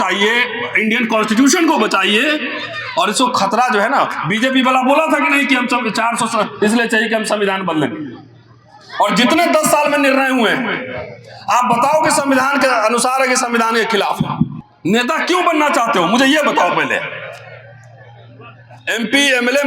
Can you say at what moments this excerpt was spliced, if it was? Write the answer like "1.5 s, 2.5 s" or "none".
14.6 s